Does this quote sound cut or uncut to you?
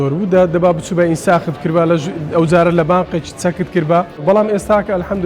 cut